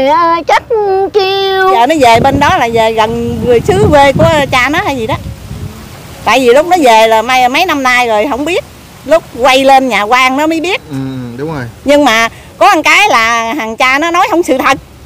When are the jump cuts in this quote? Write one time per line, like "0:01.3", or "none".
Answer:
0:01.8